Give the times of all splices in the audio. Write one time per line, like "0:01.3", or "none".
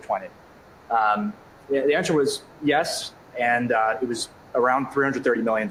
none